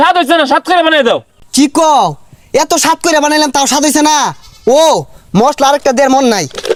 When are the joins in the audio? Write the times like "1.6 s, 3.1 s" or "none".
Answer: none